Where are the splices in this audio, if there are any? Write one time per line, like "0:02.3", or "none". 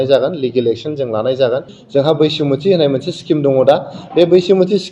0:01.8